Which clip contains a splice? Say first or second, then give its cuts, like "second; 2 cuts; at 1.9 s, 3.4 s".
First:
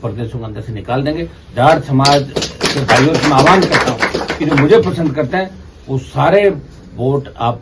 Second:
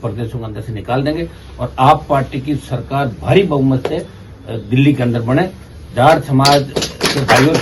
first; 1 cut; at 1.4 s